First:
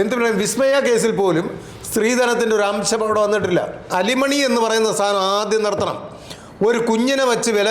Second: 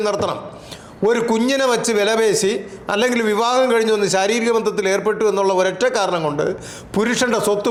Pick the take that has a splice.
first; 1 cut; at 3.9 s

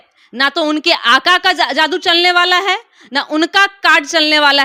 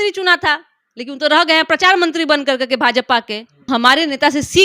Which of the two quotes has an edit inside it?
second; 1 cut; at 3.6 s

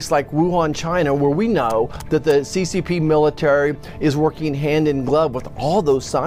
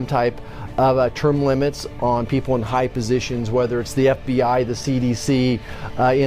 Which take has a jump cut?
second; 1 cut; at 2.3 s

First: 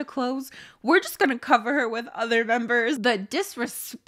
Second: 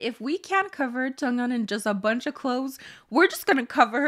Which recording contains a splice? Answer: first; 1 cut; at 3.0 s

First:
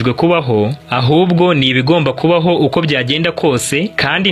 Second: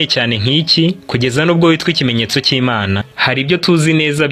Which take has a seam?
second; 1 cut; at 3.1 s

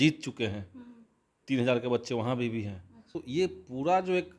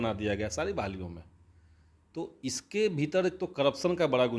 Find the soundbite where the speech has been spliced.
first; 1 cut; at 3.2 s

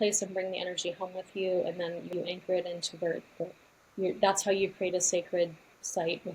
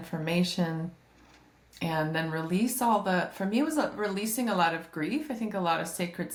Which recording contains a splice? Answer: first; 1 cut; at 2.1 s

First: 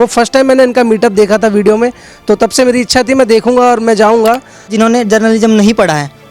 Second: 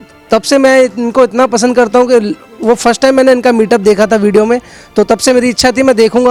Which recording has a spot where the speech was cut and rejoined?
first; 1 cut; at 4.7 s

